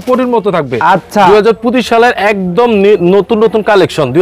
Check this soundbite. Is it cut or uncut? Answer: cut